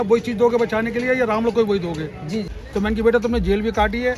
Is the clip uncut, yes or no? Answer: no